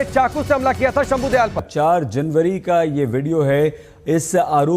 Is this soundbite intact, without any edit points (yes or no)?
no